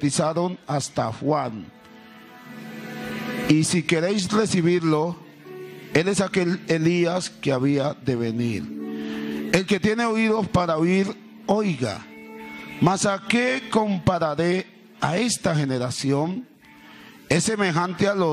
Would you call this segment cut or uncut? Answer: uncut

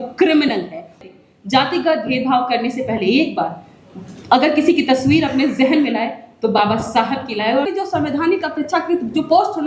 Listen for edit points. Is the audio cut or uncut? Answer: cut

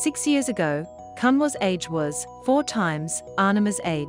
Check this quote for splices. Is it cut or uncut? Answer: uncut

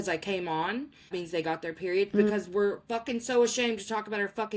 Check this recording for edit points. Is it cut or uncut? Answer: cut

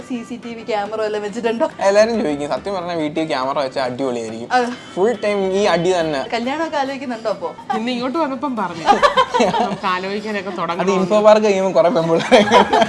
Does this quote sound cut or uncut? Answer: cut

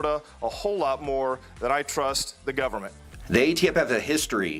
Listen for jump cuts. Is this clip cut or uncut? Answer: cut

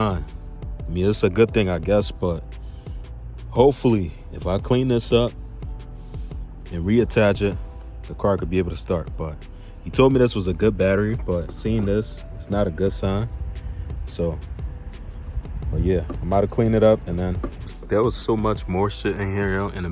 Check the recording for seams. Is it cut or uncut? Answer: cut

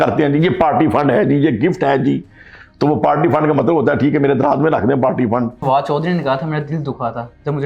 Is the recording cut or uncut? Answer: cut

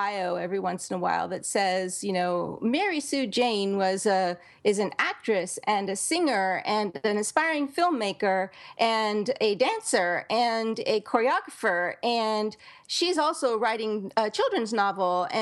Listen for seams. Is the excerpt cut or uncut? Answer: uncut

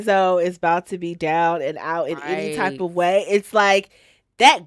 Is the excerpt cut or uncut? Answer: uncut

